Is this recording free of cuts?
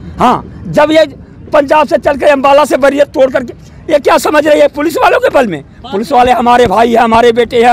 yes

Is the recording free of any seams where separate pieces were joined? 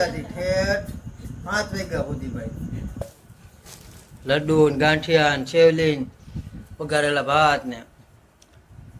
no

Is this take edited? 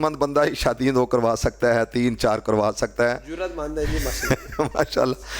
no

